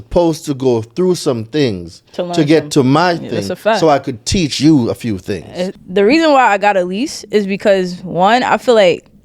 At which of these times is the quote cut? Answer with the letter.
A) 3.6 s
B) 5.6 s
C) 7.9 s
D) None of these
B